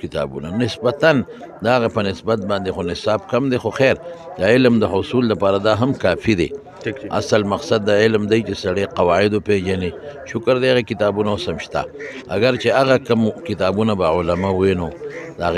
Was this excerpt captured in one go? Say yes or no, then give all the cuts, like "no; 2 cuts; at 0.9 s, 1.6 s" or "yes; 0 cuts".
yes; 0 cuts